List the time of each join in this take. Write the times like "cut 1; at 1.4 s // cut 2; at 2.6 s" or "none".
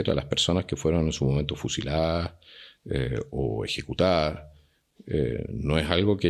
none